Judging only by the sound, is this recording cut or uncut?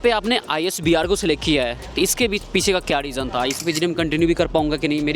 cut